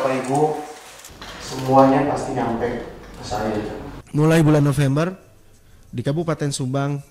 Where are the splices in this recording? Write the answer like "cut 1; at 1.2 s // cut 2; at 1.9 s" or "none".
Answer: cut 1; at 4.0 s